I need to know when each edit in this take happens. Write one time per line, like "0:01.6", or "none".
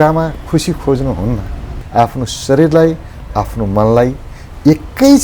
0:01.8